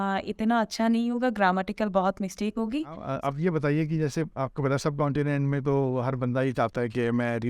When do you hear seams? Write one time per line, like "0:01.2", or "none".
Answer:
0:03.0